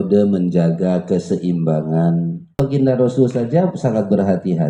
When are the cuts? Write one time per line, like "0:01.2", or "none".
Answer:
0:02.6